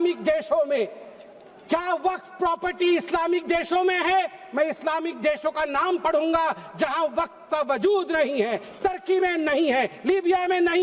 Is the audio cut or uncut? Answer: uncut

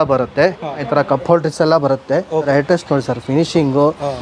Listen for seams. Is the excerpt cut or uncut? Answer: cut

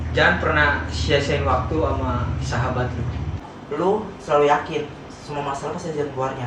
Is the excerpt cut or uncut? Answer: cut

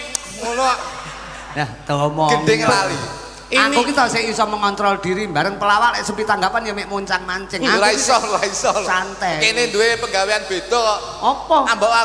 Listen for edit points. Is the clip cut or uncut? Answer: cut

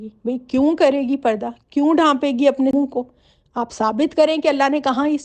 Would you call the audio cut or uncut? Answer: uncut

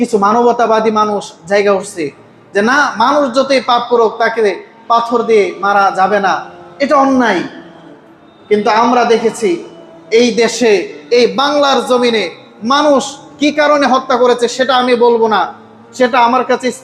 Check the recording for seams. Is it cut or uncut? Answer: uncut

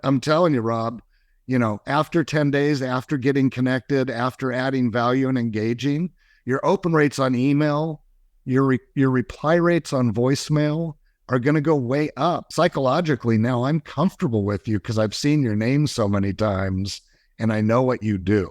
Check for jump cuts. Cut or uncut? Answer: cut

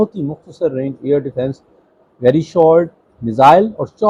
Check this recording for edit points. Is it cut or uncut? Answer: uncut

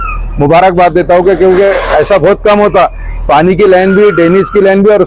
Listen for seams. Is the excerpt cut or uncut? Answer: uncut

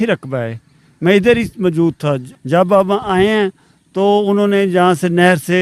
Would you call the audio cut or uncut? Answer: cut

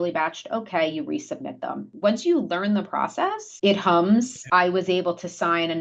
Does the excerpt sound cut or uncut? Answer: cut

